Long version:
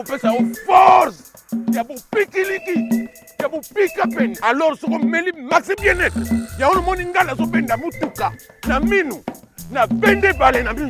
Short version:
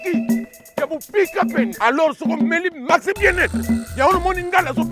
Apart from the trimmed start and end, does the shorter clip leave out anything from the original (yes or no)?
no